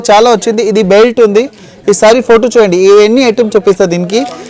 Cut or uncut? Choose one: uncut